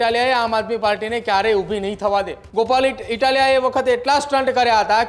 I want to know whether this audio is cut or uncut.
cut